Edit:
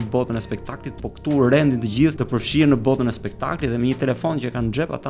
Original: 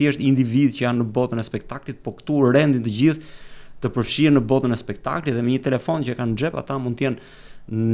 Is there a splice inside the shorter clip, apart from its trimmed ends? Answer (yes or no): yes